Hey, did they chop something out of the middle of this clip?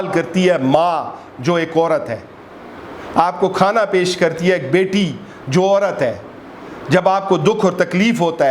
no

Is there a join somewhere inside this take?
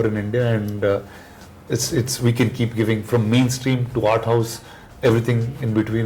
no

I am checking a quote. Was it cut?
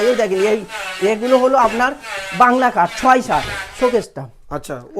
yes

